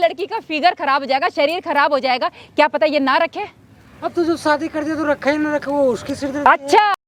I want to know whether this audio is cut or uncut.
uncut